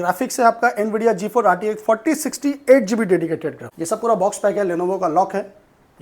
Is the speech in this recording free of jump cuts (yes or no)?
no